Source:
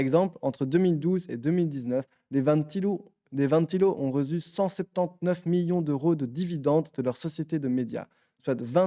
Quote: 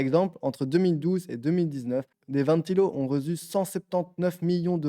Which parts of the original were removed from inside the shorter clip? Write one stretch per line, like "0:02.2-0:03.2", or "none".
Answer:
0:02.2-0:03.2